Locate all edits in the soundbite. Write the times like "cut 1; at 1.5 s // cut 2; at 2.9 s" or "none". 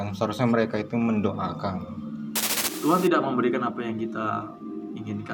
cut 1; at 2.6 s